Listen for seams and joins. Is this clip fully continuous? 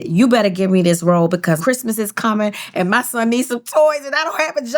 no; 1 cut; at 1.6 s

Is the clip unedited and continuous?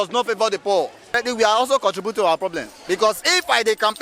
no; 1 cut; at 1.2 s

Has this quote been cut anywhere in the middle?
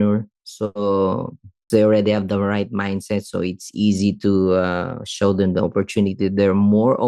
yes; 1 cut; at 1.7 s

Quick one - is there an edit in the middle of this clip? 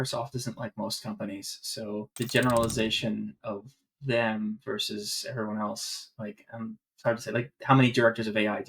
yes; 1 cut; at 2.1 s

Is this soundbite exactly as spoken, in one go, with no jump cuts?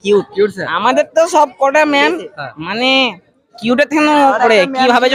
yes; 0 cuts

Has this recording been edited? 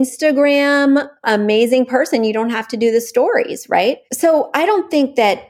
yes; 2 cuts; at 1.2 s, 4.0 s

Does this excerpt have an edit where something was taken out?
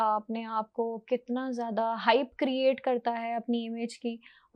no; 0 cuts

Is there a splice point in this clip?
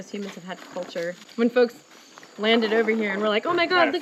yes; 1 cut; at 1.2 s

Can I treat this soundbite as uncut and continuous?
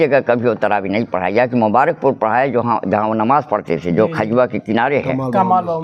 yes; 0 cuts

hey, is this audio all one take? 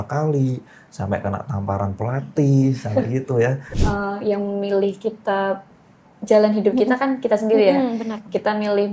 no; 1 cut; at 3.7 s

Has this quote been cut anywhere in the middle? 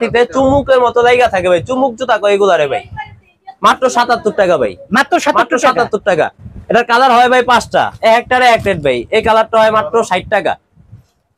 no; 0 cuts

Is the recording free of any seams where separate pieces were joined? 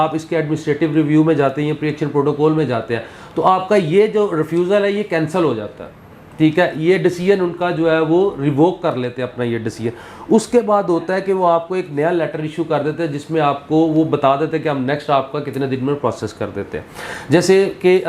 yes; 0 cuts

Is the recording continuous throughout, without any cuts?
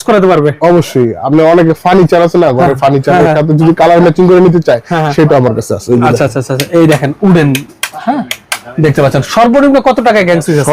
yes; 0 cuts

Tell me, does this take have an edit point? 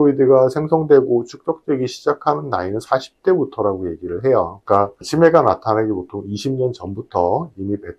yes; 1 cut; at 4.6 s

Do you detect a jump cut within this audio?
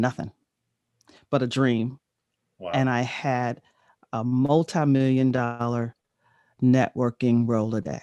no; 0 cuts

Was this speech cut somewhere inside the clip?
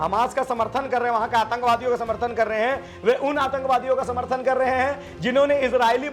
no; 0 cuts

